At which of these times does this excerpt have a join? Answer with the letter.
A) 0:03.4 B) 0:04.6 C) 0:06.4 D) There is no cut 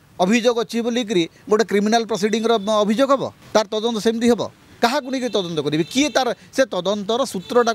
A